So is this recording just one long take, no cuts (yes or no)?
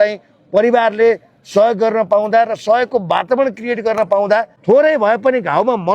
no